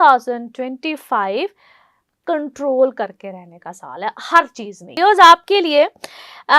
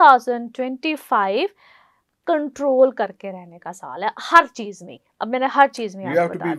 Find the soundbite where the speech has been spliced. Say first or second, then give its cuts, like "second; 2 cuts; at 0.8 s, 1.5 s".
first; 1 cut; at 4.9 s